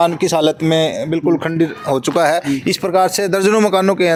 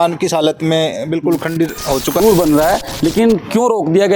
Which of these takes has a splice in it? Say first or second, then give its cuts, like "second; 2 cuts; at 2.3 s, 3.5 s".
second; 1 cut; at 2.2 s